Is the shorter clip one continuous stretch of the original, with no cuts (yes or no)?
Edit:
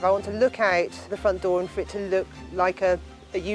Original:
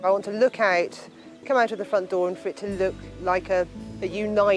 no